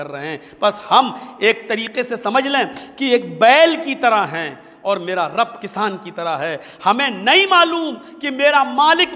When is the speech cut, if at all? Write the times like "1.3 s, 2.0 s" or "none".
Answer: none